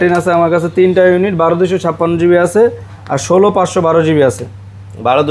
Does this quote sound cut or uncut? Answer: uncut